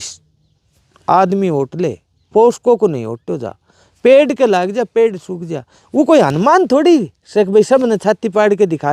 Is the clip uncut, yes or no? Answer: yes